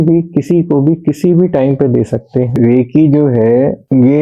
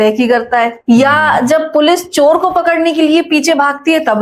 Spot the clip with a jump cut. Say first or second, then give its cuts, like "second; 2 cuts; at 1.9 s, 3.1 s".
first; 1 cut; at 2.5 s